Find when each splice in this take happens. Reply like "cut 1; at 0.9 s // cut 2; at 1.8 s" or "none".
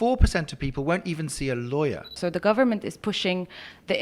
cut 1; at 2.2 s